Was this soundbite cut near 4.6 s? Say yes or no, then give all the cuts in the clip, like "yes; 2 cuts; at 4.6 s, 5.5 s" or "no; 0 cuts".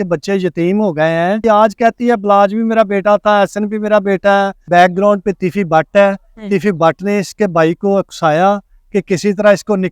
yes; 2 cuts; at 1.4 s, 4.6 s